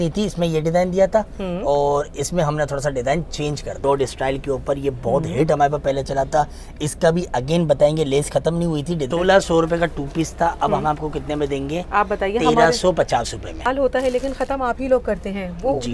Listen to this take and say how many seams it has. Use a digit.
3